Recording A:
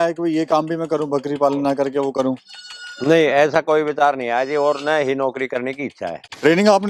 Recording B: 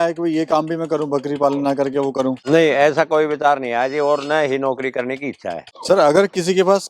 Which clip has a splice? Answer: B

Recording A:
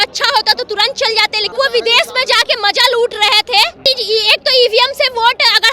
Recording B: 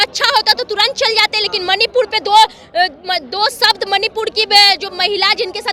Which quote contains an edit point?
A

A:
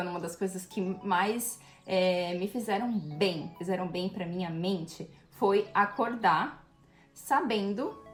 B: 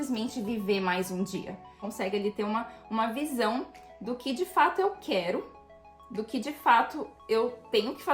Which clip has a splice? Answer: B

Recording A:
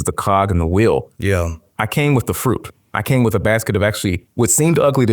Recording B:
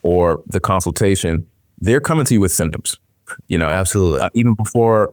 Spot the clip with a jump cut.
A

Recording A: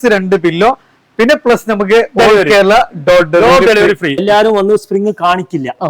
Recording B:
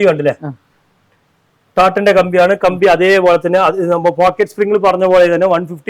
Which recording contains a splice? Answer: A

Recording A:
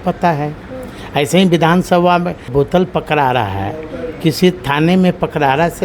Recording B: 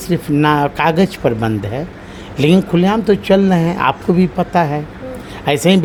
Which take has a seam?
A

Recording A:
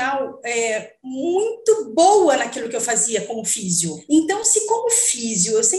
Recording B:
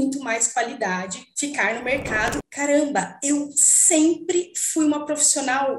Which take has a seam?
B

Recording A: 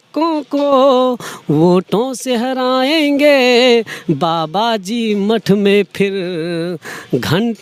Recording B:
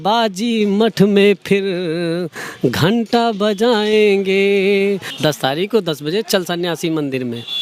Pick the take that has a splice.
B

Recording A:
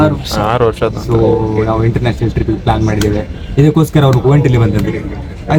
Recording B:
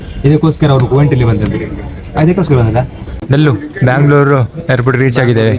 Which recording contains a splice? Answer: B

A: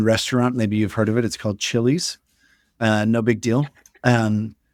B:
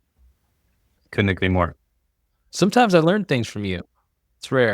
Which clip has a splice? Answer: B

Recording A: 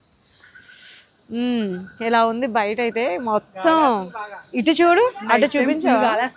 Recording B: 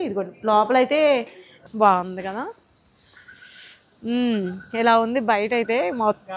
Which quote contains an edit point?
B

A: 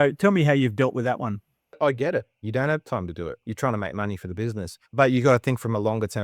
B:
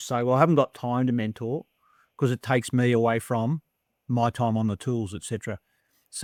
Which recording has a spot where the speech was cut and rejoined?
A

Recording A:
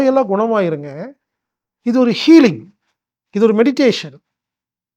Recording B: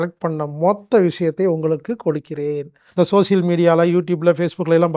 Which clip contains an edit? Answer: B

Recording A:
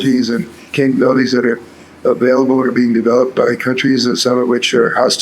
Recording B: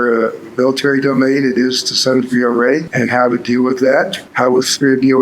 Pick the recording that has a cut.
B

